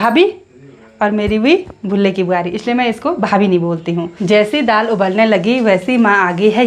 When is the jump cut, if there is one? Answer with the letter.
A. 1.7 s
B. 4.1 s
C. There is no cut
B